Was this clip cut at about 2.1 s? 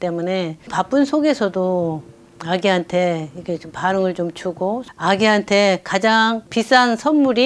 no; 1 cut; at 4.9 s

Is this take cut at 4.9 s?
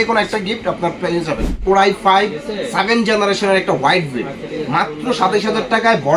no; 1 cut; at 1.5 s

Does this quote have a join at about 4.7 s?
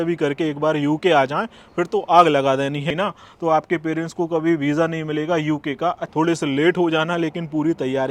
no; 2 cuts; at 2.9 s, 6.0 s

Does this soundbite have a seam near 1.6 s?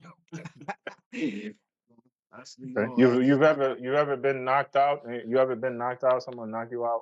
yes; 1 cut; at 1.6 s

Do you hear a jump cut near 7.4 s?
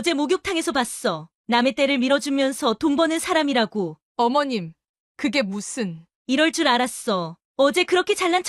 no; 1 cut; at 4.0 s

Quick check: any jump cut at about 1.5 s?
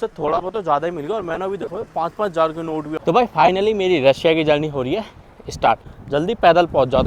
no; 2 cuts; at 3.0 s, 5.9 s

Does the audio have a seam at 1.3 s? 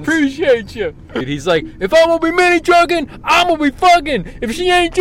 yes; 1 cut; at 1.3 s

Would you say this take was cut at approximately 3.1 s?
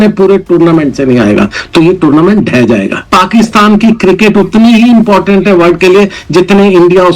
yes; 1 cut; at 3.1 s

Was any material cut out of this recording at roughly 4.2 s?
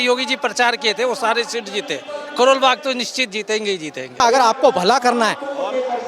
yes; 1 cut; at 4.2 s

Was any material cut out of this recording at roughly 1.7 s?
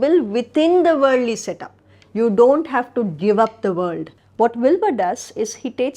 no; 1 cut; at 4.1 s

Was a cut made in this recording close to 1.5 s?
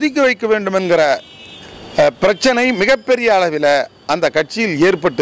no; 0 cuts

